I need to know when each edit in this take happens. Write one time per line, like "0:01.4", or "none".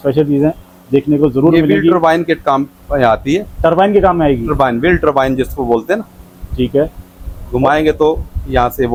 none